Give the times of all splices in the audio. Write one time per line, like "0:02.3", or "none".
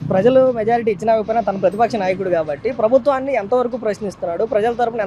none